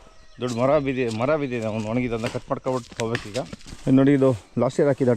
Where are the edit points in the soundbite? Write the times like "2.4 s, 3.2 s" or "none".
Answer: 3.6 s